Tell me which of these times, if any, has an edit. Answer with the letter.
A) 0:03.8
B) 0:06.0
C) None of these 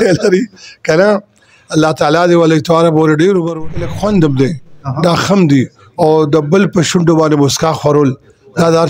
A